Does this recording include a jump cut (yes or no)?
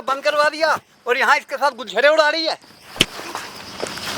yes